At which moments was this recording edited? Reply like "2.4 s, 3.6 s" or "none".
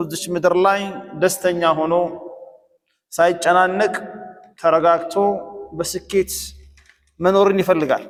none